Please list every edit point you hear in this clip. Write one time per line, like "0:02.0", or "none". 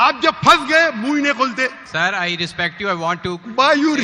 0:01.8